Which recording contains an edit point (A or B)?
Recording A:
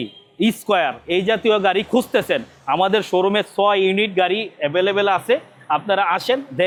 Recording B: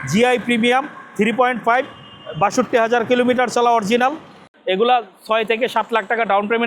B